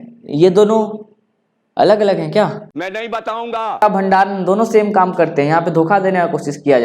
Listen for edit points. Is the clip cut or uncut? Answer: cut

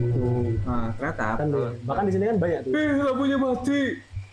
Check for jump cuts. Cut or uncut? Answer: cut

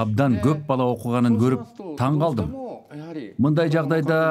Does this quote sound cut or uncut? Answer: uncut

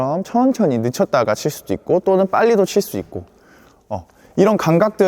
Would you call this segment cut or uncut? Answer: uncut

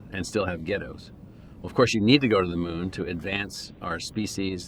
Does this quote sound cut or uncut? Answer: uncut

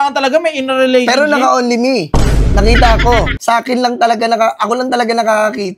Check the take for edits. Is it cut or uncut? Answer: cut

